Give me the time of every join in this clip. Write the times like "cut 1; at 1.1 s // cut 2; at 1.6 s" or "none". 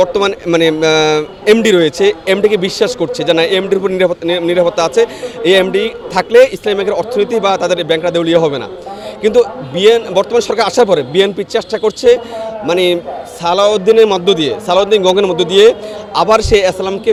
none